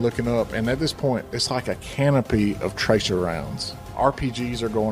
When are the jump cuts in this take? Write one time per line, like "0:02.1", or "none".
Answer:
0:03.8